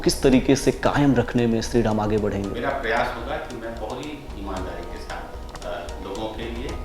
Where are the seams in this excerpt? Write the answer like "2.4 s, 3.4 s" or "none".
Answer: 2.5 s